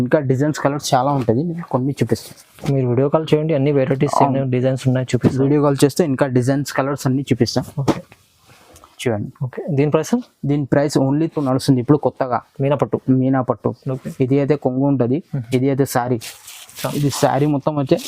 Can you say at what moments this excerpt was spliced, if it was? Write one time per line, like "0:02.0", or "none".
0:11.4

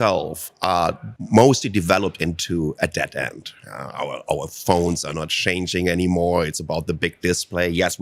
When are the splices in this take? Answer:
0:01.1

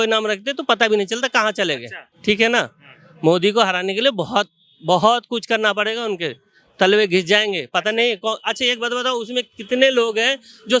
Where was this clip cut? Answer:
none

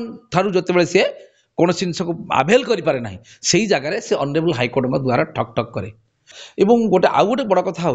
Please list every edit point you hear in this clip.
0:06.3

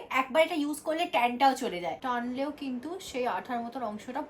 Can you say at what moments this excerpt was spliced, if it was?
0:02.0

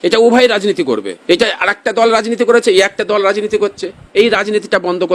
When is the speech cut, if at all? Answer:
0:01.1

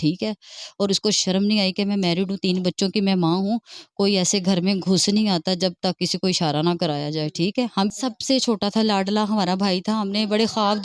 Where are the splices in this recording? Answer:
0:07.9

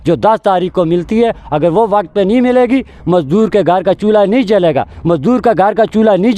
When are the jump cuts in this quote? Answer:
none

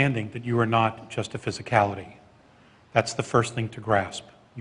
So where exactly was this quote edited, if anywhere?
none

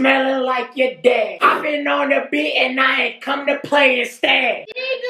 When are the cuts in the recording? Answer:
0:01.4

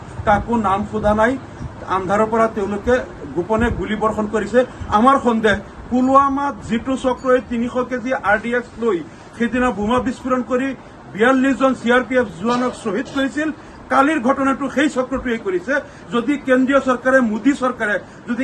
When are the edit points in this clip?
none

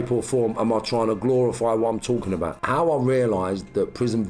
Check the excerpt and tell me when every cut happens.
0:02.6

